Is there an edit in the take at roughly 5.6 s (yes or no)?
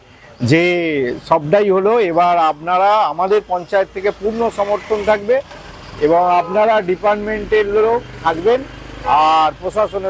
no